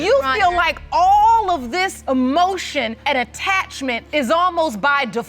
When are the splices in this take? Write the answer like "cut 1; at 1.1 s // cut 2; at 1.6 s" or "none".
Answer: cut 1; at 2.0 s // cut 2; at 3.0 s // cut 3; at 4.0 s

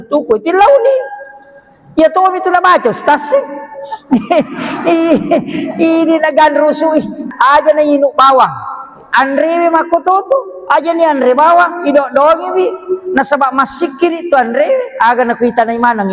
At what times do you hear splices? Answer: cut 1; at 7.2 s

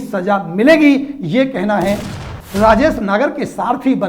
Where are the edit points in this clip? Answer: cut 1; at 2.1 s

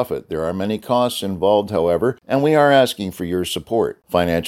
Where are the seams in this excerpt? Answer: cut 1; at 2.2 s

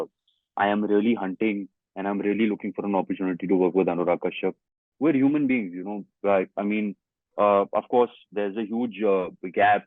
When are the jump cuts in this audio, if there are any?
cut 1; at 4.8 s

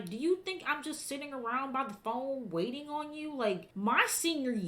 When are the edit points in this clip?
cut 1; at 3.7 s

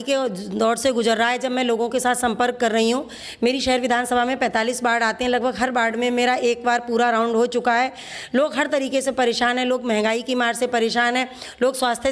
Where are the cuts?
none

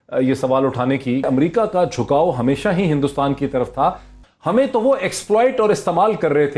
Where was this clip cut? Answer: cut 1; at 1.3 s // cut 2; at 4.2 s

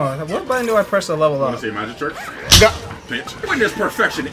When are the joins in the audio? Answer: cut 1; at 3.4 s

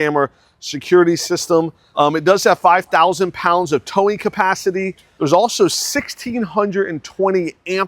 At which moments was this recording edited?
cut 1; at 1.8 s // cut 2; at 5.0 s

